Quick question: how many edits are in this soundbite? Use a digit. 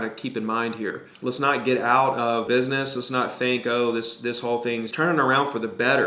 3